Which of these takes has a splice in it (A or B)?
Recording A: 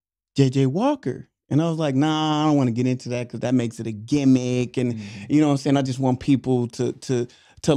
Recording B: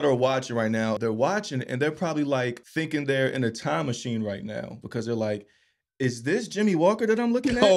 B